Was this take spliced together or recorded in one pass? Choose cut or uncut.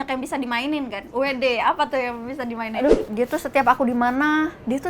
cut